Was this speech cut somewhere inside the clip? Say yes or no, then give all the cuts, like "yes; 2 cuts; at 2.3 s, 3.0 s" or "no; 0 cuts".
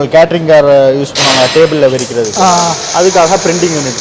no; 0 cuts